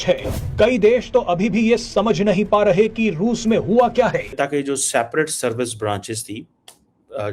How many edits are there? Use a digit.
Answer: 1